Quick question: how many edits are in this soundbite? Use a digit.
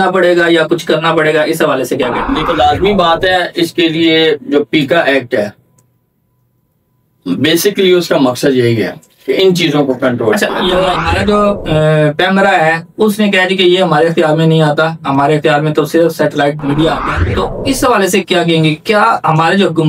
3